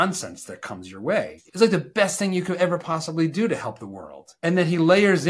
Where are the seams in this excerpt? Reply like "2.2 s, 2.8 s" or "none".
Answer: 1.4 s